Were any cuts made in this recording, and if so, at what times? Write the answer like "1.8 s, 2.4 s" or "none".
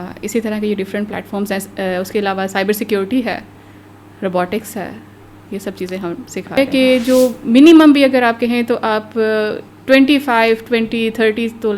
6.6 s